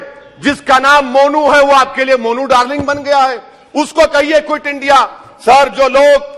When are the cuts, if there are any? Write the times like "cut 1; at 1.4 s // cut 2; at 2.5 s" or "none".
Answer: none